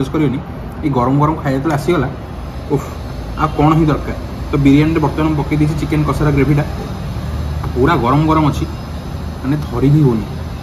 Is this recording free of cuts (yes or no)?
yes